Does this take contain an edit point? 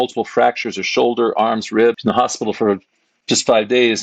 yes; 1 cut; at 2.0 s

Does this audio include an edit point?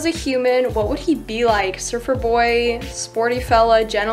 no; 0 cuts

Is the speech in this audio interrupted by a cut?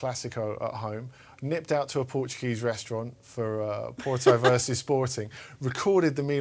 yes; 1 cut; at 5.0 s

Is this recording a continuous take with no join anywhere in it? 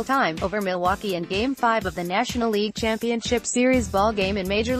yes; 0 cuts

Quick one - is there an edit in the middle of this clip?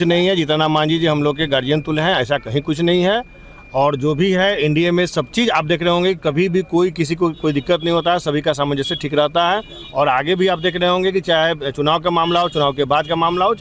no; 0 cuts

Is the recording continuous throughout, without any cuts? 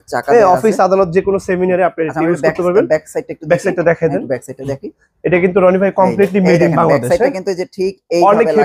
yes; 0 cuts

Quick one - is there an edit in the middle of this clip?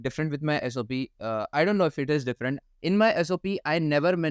no; 0 cuts

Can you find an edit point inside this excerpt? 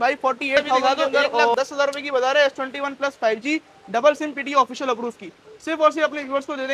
yes; 1 cut; at 1.5 s

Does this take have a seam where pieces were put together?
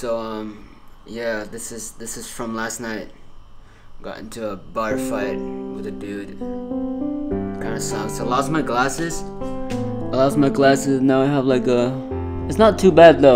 no; 0 cuts

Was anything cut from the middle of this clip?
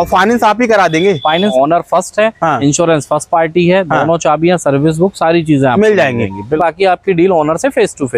yes; 2 cuts; at 1.5 s, 6.6 s

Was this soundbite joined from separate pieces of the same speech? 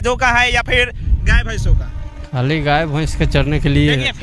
no; 0 cuts

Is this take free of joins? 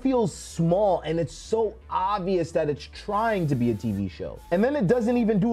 yes; 0 cuts

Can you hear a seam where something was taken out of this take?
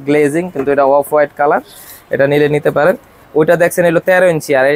no; 0 cuts

